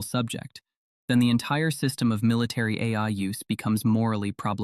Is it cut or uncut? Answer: uncut